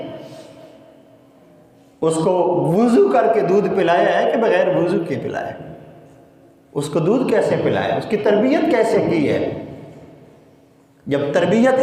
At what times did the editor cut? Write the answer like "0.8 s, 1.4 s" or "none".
none

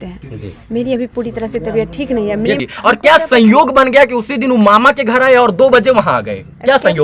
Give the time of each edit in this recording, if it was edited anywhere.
2.7 s

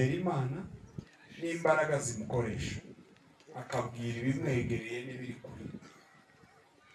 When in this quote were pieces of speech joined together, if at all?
none

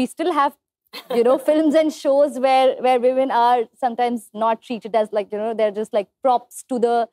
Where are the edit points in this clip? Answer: none

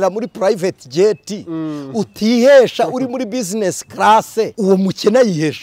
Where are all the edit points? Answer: 4.5 s

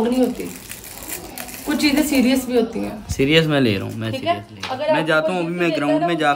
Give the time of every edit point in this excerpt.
none

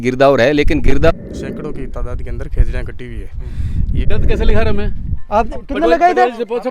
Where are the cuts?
1.1 s, 4.0 s

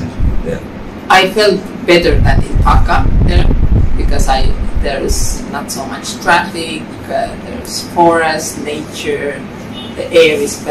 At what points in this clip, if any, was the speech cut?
1.0 s

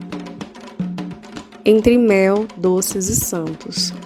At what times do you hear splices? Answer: none

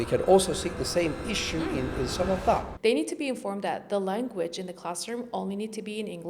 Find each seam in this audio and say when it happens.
2.7 s

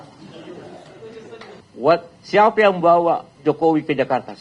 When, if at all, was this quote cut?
1.6 s

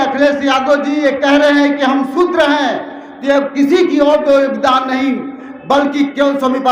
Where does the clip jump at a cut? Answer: none

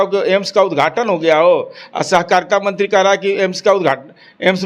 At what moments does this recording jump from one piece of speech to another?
none

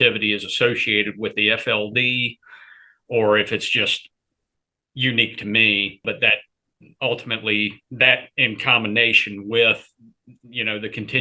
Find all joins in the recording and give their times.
6.0 s

